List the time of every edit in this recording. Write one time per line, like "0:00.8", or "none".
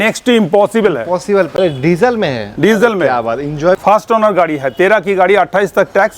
0:01.5
0:03.8